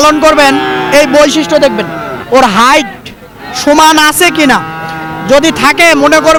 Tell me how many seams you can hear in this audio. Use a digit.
0